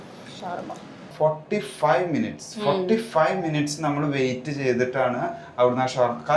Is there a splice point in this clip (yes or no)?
yes